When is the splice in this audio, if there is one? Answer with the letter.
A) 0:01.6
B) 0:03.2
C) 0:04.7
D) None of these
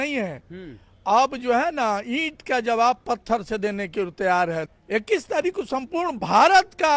C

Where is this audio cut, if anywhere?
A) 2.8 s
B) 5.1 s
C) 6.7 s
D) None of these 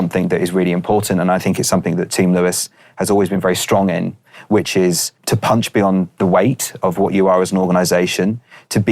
B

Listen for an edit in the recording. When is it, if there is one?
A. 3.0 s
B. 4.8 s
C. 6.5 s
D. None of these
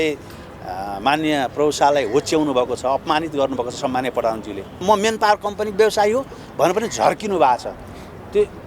B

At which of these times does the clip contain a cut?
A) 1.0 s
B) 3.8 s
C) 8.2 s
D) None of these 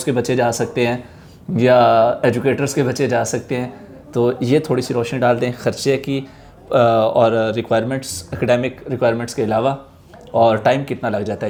D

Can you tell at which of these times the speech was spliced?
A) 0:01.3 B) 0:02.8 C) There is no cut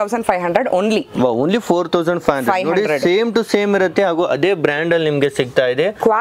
C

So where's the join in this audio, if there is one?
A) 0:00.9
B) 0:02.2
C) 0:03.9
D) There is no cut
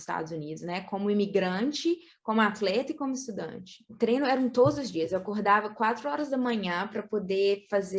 C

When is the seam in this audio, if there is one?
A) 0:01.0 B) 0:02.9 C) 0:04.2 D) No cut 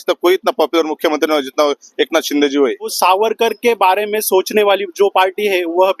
B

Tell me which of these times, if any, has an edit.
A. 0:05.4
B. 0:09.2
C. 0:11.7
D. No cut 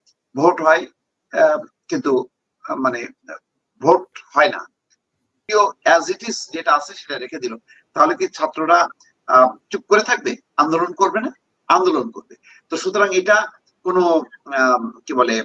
A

